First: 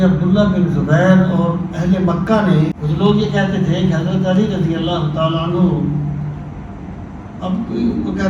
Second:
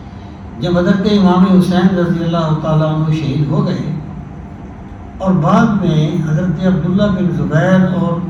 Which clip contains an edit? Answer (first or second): first